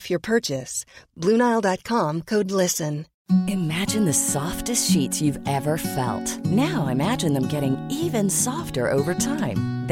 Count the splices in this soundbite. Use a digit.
1